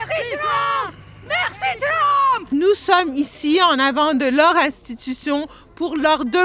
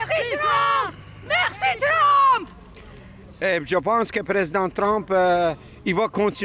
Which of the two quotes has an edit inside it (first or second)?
first